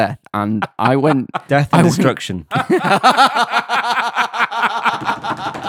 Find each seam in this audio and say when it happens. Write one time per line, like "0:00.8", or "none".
0:02.5